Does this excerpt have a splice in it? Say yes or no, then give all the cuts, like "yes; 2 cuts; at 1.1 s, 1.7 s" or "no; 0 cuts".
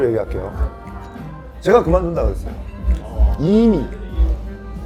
no; 0 cuts